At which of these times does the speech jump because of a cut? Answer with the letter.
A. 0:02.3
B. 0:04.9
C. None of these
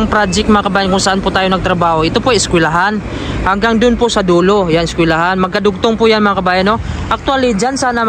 C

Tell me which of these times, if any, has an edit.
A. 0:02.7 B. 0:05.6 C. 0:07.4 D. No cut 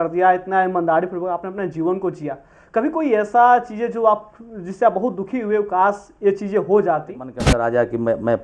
C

